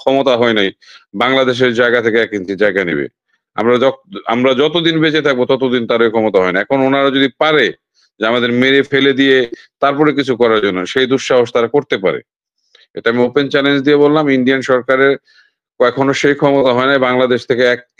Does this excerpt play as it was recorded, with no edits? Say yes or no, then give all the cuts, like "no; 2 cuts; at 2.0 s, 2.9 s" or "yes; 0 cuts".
yes; 0 cuts